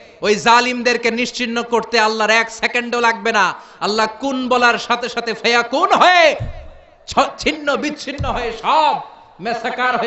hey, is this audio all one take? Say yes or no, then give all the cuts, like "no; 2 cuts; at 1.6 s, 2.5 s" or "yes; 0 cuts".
yes; 0 cuts